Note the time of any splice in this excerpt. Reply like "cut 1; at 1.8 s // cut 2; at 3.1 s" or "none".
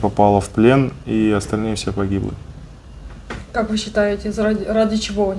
none